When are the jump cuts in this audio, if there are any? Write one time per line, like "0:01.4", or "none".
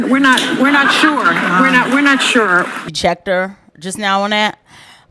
0:02.8